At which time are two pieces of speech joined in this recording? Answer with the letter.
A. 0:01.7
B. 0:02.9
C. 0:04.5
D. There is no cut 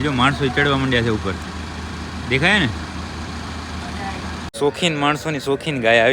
C